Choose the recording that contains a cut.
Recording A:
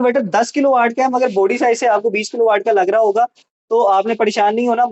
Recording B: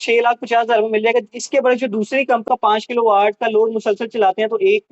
B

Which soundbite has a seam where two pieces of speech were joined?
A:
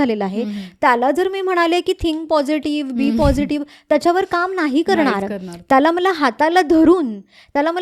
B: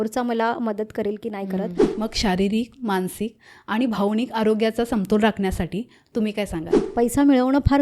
B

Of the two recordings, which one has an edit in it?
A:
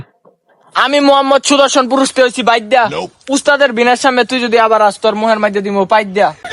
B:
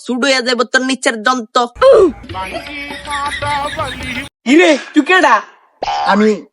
B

